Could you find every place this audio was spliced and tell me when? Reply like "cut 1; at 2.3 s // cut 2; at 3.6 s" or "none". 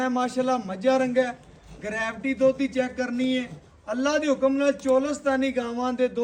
none